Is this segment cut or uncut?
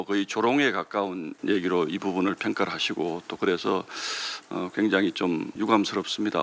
cut